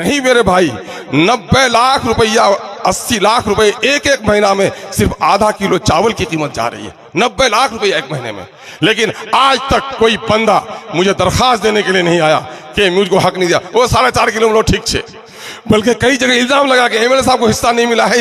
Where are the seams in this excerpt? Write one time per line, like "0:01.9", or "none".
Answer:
none